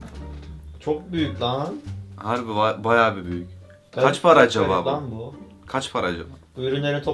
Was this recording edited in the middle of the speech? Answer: no; 0 cuts

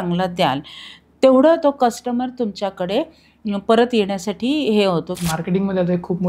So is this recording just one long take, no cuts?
no; 1 cut; at 5.1 s

